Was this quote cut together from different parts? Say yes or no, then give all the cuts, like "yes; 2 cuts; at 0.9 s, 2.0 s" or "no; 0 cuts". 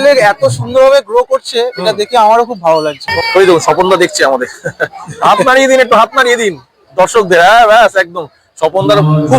yes; 1 cut; at 3.0 s